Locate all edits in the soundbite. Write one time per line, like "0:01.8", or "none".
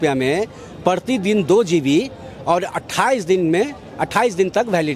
none